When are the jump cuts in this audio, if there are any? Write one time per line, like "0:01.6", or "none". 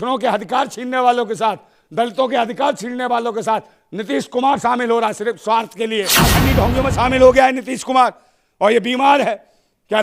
0:06.3